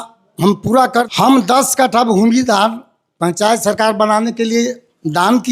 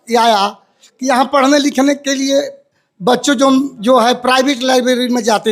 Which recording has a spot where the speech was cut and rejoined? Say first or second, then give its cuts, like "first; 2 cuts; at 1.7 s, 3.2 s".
first; 1 cut; at 1.1 s